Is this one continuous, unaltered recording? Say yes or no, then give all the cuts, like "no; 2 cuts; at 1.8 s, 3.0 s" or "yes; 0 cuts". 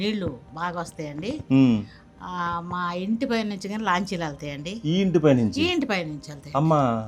yes; 0 cuts